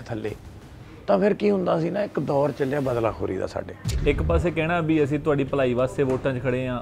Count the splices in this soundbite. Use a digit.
1